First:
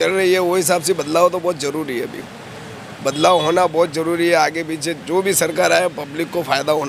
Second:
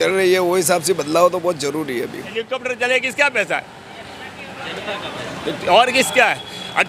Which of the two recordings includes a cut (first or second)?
second